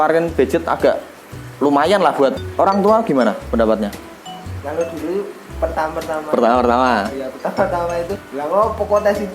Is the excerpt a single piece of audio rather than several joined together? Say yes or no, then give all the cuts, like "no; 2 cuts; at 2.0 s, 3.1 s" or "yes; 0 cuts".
no; 2 cuts; at 2.4 s, 8.2 s